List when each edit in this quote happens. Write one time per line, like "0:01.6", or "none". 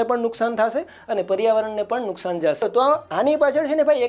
0:02.6